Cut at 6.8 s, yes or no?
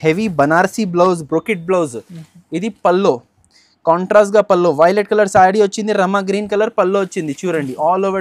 no